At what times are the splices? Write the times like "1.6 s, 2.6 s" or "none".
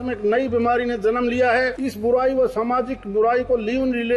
1.8 s